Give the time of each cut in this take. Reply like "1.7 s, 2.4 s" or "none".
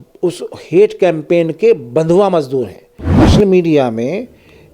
3.2 s